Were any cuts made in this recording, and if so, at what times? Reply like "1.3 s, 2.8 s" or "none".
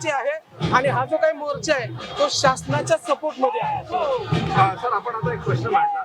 none